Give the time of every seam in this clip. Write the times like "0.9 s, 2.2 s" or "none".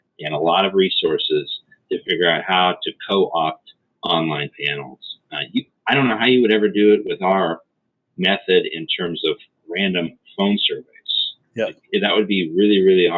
none